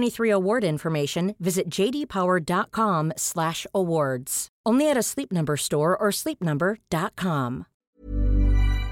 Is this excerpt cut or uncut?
cut